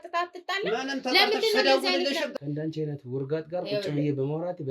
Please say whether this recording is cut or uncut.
cut